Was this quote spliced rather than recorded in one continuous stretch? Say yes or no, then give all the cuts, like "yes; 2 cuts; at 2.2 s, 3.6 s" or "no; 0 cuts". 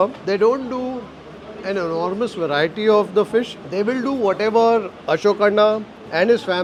no; 0 cuts